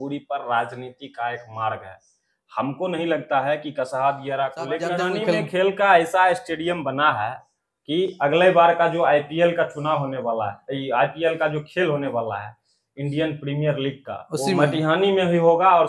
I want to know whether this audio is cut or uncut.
cut